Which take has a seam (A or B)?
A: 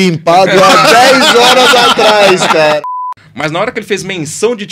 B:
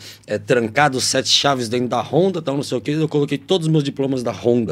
A